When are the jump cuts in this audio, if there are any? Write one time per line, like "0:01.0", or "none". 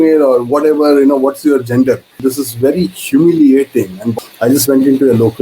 0:02.2
0:04.0